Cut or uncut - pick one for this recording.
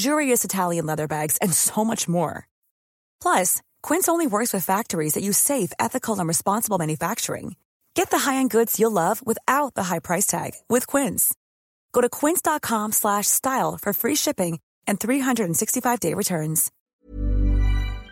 cut